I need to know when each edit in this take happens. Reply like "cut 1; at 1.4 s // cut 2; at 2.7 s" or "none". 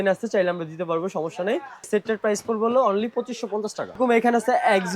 cut 1; at 1.9 s // cut 2; at 4.0 s